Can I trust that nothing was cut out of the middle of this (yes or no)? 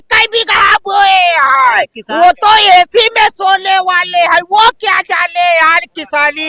yes